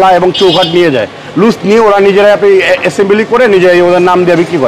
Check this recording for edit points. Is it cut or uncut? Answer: uncut